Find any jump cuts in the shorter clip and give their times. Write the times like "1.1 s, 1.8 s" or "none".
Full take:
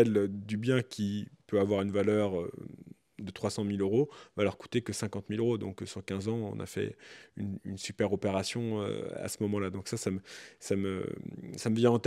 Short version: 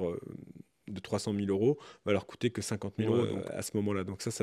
3.4 s